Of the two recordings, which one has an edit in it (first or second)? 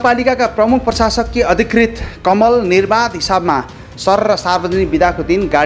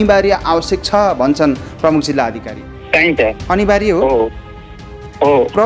second